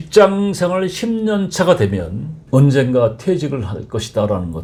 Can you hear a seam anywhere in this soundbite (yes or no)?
no